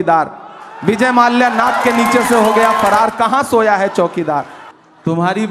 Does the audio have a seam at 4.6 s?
yes; 1 cut; at 4.6 s

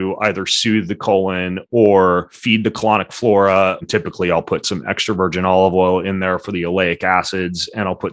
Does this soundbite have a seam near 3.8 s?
yes; 2 cuts; at 2.4 s, 3.8 s

